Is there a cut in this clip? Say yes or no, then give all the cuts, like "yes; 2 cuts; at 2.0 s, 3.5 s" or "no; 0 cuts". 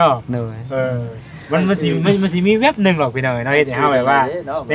no; 0 cuts